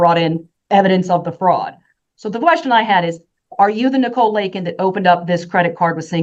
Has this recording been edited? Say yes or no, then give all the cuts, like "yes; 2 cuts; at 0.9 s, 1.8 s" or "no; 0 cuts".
no; 0 cuts